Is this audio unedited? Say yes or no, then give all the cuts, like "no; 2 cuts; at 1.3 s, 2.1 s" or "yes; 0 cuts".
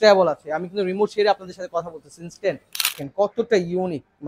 no; 1 cut; at 3.0 s